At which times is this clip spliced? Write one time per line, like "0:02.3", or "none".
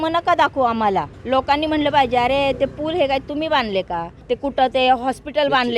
0:01.1
0:04.1